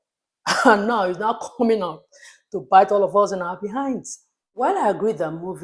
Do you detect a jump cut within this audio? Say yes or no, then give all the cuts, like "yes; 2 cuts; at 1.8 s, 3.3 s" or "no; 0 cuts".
yes; 1 cut; at 4.6 s